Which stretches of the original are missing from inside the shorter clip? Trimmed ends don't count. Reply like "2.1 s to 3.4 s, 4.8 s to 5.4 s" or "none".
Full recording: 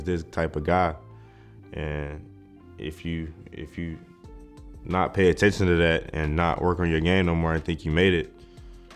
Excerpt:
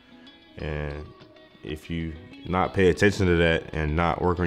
3.4 s to 4.7 s

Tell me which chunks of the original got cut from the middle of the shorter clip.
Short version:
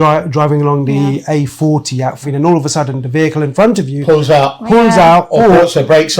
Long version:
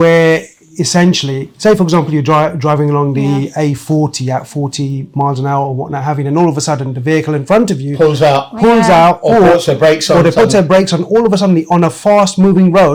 4.6 s to 6.2 s

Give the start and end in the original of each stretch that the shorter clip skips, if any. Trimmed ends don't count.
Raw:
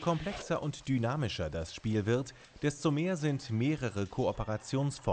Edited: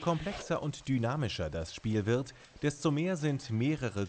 none

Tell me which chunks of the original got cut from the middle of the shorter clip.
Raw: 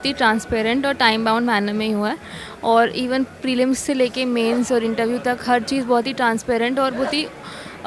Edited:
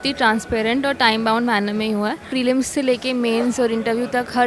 2.2 s to 3.4 s

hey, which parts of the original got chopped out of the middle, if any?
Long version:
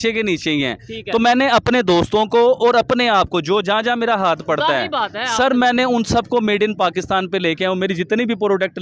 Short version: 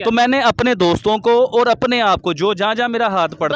none

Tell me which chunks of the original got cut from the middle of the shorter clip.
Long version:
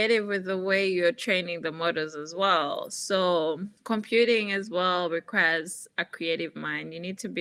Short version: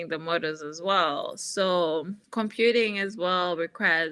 none

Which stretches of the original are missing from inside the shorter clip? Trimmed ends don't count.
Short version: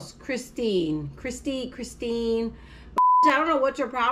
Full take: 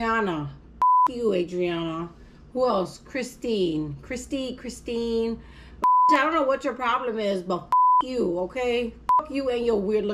none

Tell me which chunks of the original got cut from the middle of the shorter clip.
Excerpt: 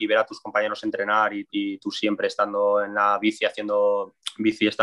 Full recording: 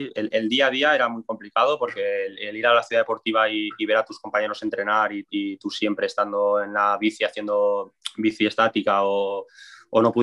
none

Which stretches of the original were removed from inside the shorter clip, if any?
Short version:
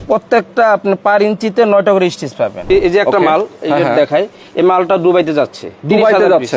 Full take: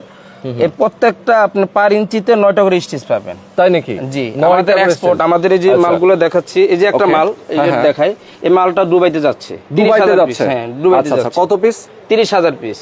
3.3 s to 6.5 s

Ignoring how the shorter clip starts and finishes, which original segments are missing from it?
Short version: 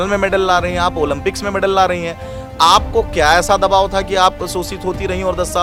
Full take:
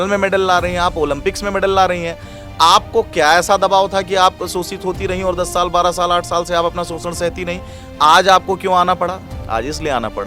none

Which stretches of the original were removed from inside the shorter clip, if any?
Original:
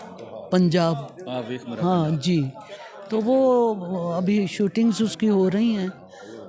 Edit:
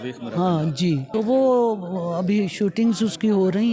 2.5 s to 3.0 s

